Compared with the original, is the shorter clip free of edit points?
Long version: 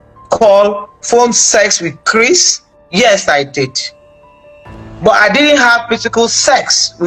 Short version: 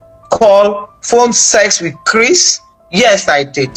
yes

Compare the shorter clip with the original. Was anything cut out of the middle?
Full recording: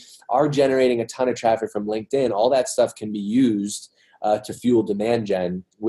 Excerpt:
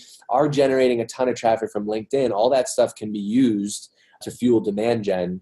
yes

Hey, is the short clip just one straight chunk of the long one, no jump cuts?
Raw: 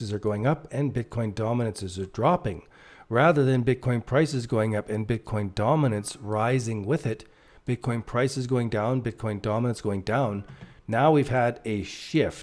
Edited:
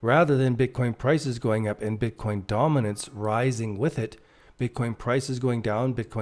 yes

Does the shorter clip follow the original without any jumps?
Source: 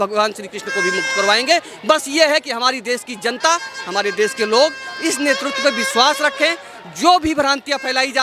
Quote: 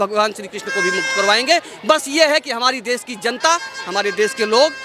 yes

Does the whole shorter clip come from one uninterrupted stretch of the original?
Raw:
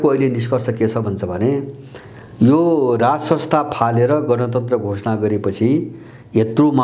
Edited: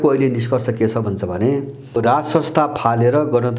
no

